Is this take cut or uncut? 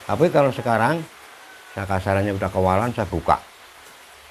uncut